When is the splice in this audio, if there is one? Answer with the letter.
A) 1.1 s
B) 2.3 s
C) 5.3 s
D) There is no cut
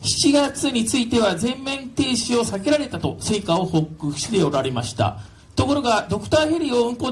D